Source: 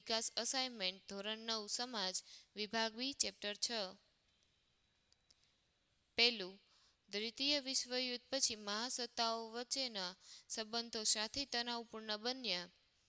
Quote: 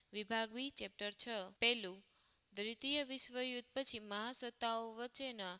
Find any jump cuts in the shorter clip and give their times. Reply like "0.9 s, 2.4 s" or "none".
1.5 s